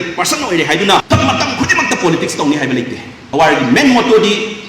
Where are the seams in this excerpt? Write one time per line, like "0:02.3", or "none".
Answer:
0:01.0
0:03.2